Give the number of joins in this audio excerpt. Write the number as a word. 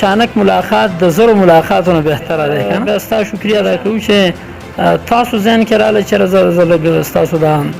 one